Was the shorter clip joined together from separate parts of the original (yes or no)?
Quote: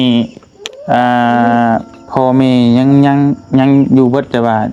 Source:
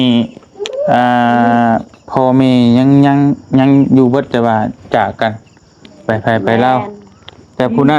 no